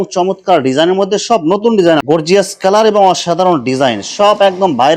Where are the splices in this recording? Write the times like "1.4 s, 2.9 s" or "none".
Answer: 2.0 s